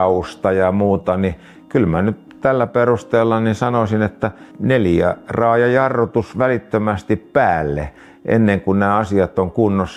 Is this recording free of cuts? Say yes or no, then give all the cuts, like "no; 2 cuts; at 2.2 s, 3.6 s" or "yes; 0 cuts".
yes; 0 cuts